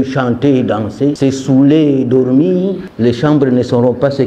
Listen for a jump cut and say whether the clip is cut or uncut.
cut